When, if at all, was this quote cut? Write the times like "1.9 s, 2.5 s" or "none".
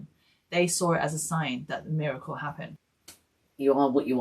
2.7 s